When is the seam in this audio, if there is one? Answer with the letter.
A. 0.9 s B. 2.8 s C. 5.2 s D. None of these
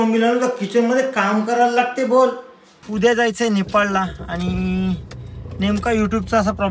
B